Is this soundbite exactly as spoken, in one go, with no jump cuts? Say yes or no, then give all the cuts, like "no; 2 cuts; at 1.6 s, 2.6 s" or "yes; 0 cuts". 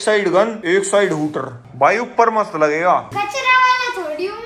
no; 1 cut; at 1.6 s